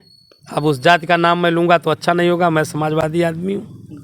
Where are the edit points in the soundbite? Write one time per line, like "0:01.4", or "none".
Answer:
none